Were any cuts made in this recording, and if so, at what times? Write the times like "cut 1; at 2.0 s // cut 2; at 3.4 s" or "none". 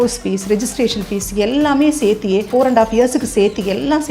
cut 1; at 2.5 s